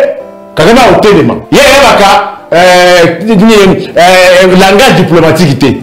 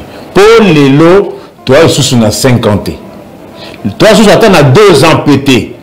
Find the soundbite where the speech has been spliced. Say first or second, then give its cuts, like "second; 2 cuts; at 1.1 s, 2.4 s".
first; 1 cut; at 1.4 s